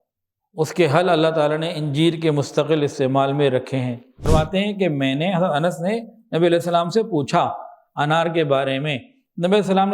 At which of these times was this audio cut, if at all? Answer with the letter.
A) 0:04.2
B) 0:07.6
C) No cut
A